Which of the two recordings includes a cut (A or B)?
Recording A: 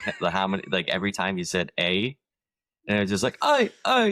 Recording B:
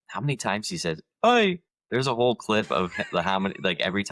B